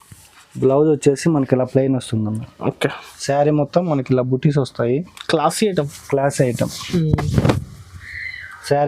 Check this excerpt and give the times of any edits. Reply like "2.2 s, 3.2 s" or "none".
3.1 s